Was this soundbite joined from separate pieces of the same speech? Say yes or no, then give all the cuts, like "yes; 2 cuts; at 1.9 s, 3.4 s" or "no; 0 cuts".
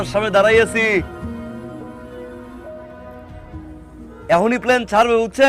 no; 0 cuts